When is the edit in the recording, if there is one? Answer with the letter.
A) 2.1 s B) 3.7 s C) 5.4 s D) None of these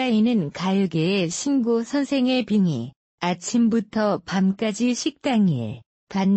C